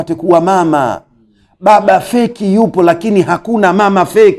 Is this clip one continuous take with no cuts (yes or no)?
yes